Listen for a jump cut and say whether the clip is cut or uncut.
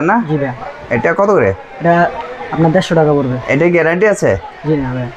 uncut